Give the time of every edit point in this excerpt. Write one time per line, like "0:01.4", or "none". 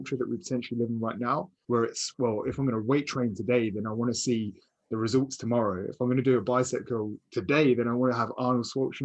0:01.5